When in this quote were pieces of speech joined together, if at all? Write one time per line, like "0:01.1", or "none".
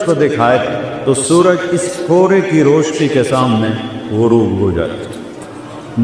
none

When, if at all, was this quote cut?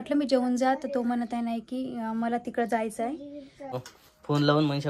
0:03.7

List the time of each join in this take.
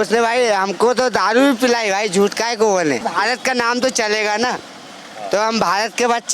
0:03.1

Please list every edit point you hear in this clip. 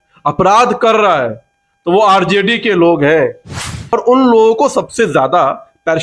0:03.9

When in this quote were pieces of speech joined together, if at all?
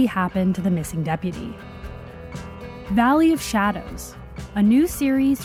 none

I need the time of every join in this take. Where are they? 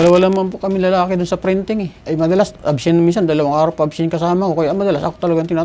0:02.0

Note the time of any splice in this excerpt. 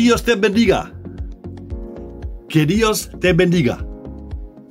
0:01.1
0:02.4
0:03.8

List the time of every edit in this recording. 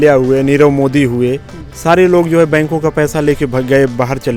none

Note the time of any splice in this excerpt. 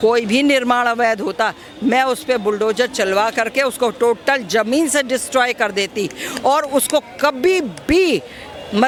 none

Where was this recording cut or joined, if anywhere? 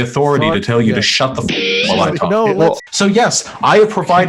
0:02.8

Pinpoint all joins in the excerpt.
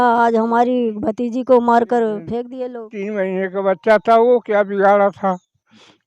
0:02.5

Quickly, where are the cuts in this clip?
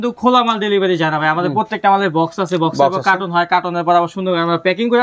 none

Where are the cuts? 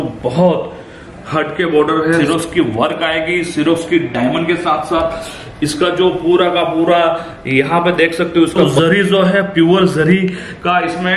0:02.2
0:08.7

